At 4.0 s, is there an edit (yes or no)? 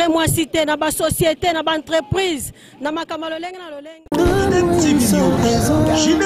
yes